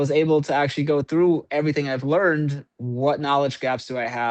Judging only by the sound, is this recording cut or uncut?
cut